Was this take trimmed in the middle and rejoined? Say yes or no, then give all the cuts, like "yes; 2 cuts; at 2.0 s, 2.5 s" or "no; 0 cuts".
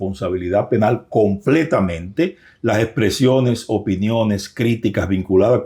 no; 0 cuts